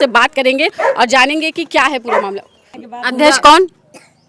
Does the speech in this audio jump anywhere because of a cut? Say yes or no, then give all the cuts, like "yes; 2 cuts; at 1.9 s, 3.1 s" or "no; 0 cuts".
yes; 1 cut; at 2.6 s